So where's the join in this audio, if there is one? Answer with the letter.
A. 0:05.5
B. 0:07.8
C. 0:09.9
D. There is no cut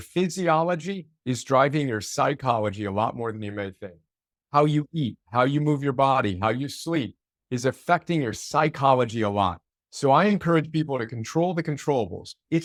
D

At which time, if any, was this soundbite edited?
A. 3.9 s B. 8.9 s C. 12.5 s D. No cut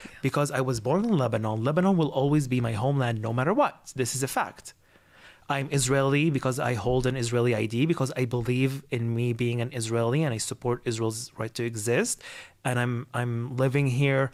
D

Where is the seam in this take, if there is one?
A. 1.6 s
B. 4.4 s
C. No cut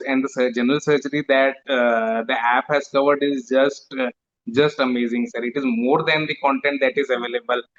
C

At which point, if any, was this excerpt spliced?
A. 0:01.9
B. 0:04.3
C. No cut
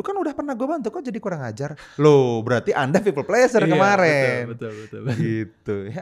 C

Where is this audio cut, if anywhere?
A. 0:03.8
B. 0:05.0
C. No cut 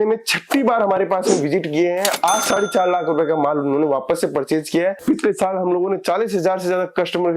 B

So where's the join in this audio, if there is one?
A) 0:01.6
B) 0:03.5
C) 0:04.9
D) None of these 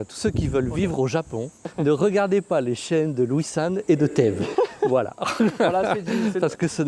A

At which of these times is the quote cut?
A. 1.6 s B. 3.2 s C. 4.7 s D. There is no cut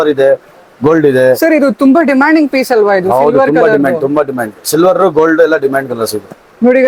D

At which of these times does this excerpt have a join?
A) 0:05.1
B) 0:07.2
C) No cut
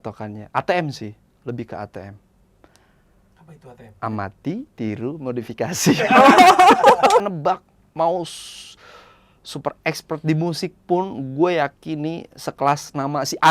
B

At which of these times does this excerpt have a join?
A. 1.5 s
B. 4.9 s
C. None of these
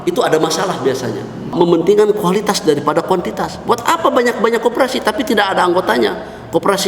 A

